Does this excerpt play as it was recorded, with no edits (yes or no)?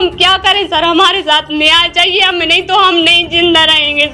yes